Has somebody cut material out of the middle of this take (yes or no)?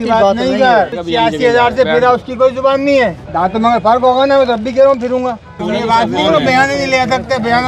yes